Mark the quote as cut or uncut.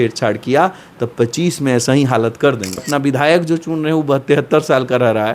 cut